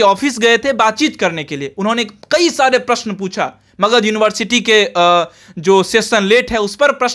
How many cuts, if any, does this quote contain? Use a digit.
0